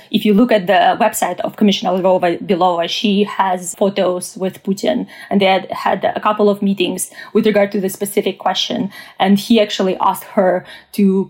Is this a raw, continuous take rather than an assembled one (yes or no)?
no